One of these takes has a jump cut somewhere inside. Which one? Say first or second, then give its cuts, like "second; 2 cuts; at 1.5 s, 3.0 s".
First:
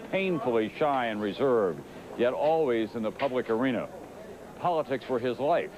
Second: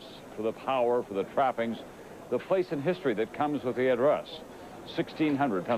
second; 1 cut; at 4.0 s